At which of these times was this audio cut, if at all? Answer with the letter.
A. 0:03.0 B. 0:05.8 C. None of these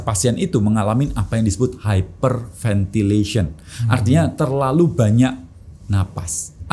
C